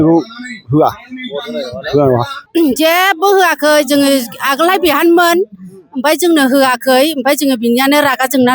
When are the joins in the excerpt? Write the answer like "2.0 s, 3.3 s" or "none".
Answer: 2.3 s